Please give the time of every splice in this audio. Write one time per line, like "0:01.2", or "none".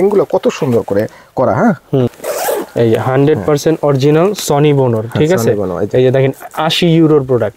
0:02.2